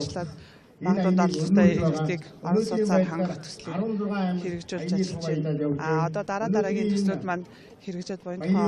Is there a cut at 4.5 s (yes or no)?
yes